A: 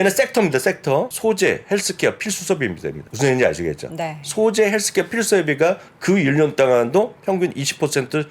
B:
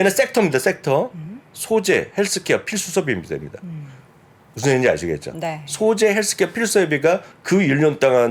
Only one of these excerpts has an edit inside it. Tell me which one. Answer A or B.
A